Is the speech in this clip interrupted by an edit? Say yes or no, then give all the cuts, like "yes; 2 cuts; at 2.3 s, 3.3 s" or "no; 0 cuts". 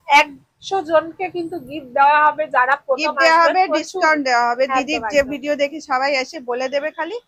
no; 0 cuts